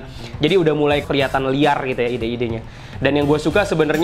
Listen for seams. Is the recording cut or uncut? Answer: cut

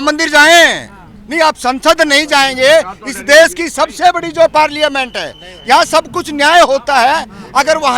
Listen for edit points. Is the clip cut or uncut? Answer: uncut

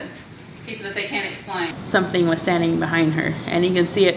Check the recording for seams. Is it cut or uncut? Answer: cut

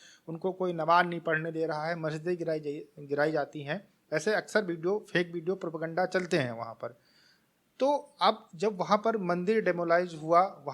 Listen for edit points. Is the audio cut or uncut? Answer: uncut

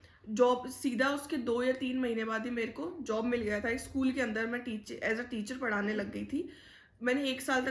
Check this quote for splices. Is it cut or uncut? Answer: uncut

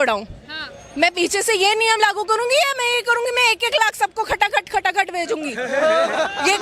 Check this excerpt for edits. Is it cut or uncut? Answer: uncut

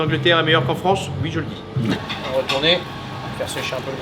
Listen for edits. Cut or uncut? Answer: uncut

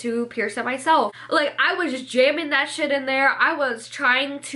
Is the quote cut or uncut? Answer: cut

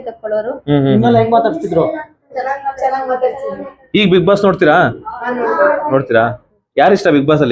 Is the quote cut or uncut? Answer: uncut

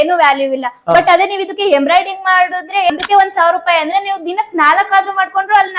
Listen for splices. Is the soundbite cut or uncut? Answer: cut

